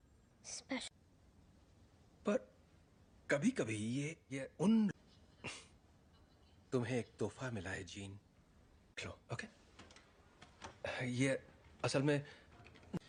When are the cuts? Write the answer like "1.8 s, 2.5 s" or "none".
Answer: none